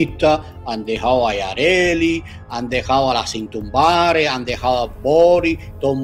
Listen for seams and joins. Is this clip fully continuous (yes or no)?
yes